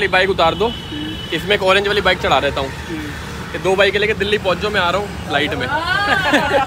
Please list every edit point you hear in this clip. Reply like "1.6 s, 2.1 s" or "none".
none